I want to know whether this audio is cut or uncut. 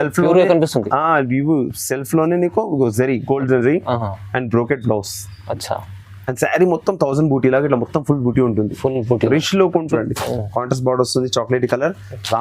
cut